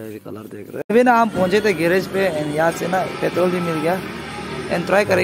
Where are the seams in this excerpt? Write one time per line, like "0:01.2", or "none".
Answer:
0:00.9